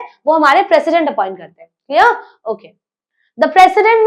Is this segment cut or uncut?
uncut